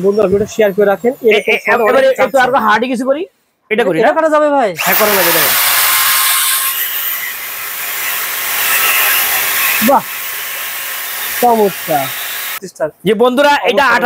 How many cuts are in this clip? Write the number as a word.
one